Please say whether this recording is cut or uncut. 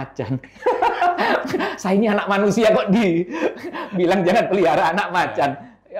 uncut